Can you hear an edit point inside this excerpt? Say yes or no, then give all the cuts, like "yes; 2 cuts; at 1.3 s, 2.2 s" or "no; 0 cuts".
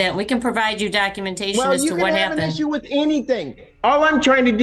no; 0 cuts